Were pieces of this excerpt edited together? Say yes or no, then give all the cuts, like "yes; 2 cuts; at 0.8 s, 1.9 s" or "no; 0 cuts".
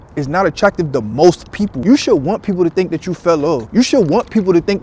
yes; 1 cut; at 1.8 s